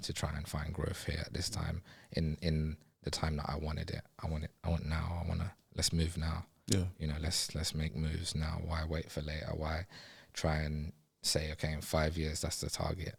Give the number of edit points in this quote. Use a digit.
0